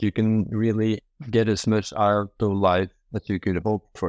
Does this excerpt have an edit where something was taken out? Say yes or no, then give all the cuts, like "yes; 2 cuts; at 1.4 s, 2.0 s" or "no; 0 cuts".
yes; 1 cut; at 1.1 s